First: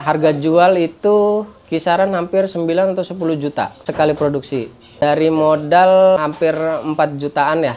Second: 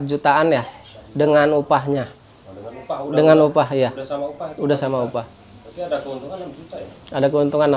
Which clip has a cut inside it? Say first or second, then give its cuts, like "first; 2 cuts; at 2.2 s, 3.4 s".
first; 3 cuts; at 3.8 s, 5.0 s, 6.2 s